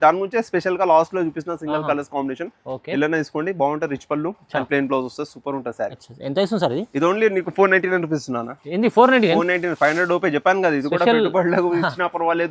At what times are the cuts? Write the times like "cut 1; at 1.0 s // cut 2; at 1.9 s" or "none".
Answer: none